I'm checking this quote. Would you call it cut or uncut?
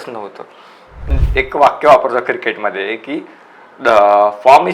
cut